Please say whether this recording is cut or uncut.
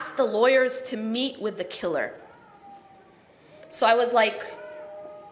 uncut